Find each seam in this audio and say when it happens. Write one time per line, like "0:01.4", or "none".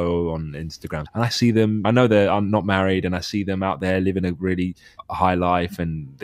0:01.0
0:01.8
0:04.9